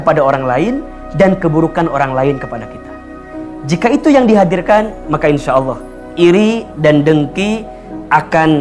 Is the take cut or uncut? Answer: uncut